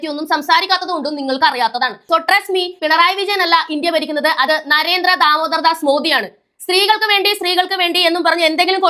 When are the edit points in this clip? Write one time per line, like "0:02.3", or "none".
0:02.0